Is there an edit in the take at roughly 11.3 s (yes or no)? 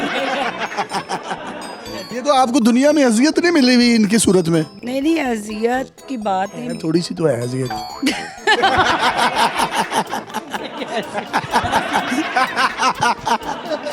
no